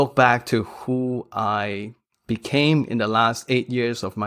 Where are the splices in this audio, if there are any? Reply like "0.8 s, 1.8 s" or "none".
none